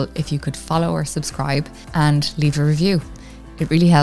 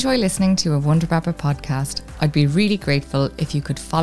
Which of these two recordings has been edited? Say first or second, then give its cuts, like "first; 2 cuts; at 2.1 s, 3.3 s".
first; 1 cut; at 1.8 s